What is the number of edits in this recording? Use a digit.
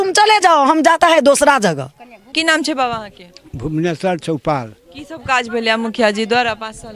1